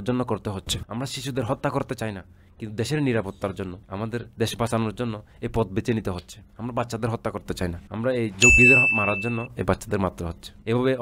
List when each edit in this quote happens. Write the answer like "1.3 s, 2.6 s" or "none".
none